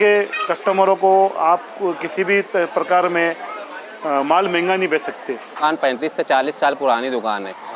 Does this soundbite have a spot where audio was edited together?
yes; 1 cut; at 5.6 s

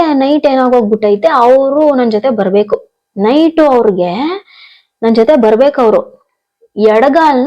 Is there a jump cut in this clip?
no; 0 cuts

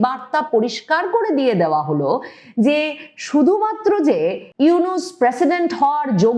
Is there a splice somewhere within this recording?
yes; 1 cut; at 4.4 s

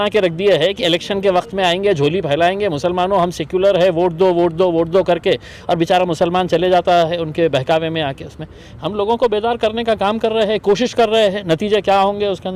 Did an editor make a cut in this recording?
no; 0 cuts

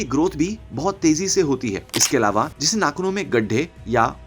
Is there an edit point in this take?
yes; 1 cut; at 2.6 s

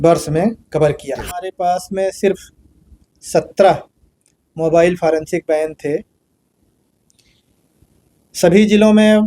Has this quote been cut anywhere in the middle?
yes; 1 cut; at 1.5 s

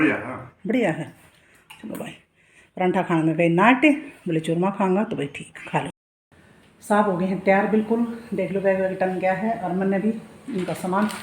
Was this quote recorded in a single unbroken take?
yes; 0 cuts

